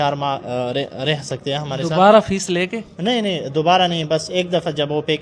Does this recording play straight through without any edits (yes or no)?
yes